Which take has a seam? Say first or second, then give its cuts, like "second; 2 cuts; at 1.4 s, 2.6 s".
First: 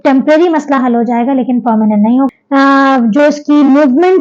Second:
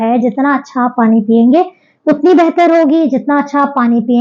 first; 1 cut; at 2.3 s